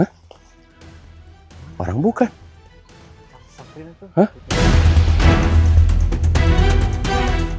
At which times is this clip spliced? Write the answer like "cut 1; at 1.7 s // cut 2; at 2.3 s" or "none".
none